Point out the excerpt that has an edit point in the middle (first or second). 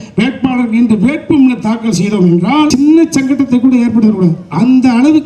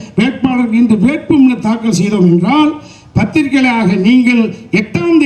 first